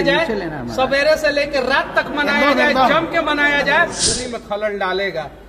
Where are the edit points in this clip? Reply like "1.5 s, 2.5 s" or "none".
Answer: 4.1 s